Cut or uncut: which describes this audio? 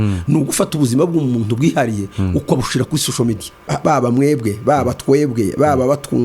cut